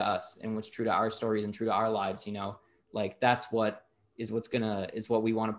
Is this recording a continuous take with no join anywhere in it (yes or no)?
yes